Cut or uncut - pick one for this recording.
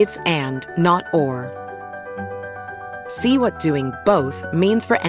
uncut